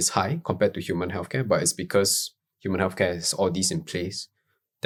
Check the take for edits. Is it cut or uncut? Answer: uncut